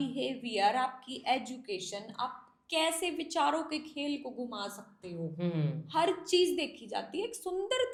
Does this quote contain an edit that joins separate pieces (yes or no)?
no